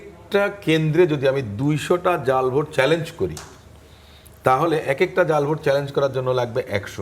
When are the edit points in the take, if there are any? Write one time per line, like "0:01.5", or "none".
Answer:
none